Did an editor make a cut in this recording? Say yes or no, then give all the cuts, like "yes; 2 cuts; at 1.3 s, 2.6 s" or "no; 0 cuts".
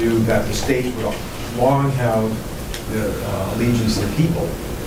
no; 0 cuts